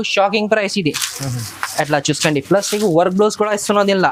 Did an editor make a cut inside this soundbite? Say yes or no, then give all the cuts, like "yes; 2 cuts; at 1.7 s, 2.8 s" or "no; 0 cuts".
no; 0 cuts